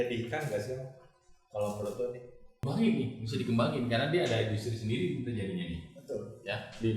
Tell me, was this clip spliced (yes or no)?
yes